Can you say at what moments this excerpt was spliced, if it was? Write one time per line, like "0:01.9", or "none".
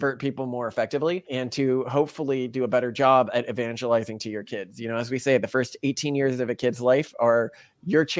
0:01.3